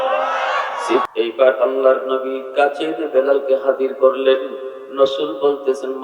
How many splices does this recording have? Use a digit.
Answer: 1